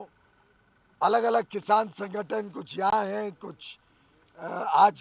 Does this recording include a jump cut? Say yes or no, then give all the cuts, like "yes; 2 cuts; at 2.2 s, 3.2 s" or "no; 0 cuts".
no; 0 cuts